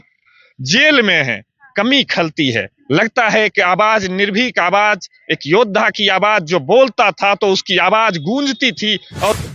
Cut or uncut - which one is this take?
uncut